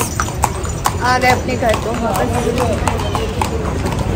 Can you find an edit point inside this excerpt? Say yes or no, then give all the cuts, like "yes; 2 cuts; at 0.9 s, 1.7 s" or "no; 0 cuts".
no; 0 cuts